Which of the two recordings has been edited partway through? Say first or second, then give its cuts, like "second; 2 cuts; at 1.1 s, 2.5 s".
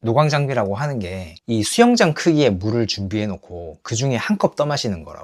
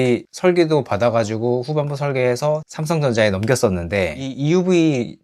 second; 1 cut; at 4.2 s